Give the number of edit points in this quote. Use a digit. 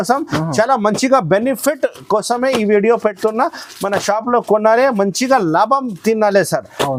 0